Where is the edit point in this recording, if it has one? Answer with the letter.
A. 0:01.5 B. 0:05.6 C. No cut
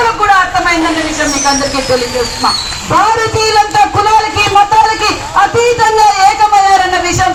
C